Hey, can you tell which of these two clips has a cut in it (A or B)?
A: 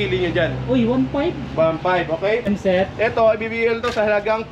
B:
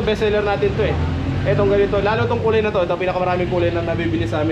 A